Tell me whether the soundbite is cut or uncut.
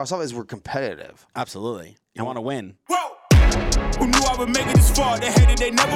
cut